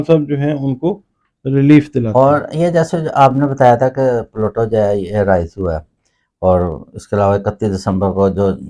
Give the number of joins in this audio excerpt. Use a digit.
1